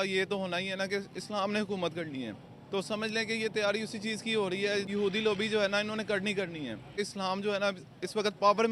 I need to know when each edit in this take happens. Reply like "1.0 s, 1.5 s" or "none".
4.9 s, 7.0 s